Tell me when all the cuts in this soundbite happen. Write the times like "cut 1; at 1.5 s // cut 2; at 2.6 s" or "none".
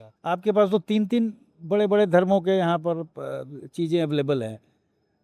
none